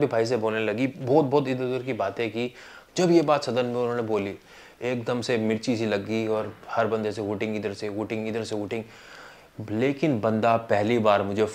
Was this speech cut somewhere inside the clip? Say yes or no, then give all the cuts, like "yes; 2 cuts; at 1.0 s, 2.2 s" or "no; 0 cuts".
yes; 1 cut; at 2.8 s